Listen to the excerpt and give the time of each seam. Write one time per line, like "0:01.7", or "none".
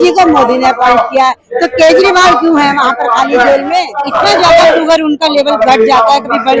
0:04.0